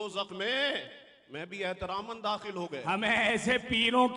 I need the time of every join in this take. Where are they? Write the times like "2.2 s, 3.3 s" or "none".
2.8 s